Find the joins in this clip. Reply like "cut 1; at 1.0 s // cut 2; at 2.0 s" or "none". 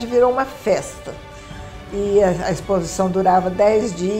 none